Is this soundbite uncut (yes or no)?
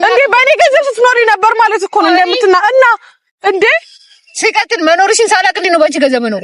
yes